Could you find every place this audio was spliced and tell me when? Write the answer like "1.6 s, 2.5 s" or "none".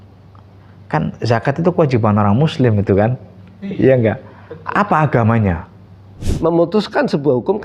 6.2 s